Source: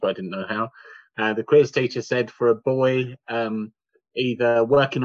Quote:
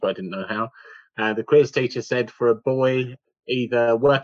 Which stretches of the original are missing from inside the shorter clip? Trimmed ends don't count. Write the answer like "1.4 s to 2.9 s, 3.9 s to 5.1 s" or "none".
3.2 s to 3.9 s